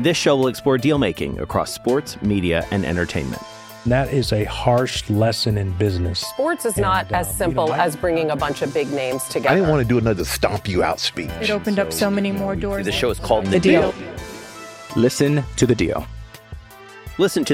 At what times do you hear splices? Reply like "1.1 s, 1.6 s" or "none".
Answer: none